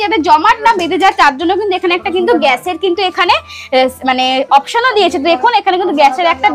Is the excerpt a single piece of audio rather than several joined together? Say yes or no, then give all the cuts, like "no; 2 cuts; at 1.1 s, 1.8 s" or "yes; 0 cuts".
yes; 0 cuts